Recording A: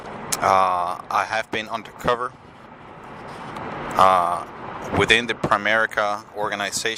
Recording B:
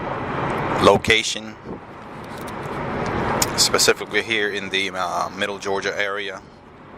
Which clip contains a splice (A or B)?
B